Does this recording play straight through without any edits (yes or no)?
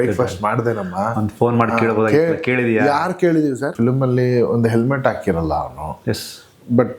no